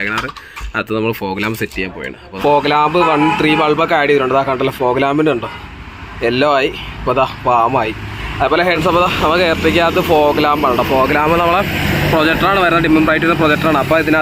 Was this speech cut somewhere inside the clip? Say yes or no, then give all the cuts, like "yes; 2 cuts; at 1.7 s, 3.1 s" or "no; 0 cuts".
yes; 2 cuts; at 2.2 s, 8.8 s